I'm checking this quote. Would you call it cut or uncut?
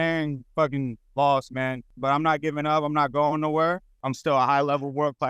cut